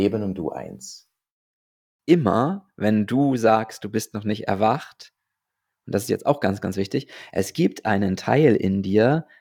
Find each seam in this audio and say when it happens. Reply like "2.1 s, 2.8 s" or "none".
1.9 s